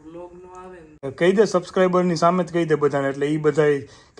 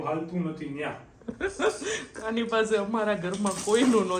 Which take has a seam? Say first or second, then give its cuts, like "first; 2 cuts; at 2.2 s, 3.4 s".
first; 1 cut; at 1.1 s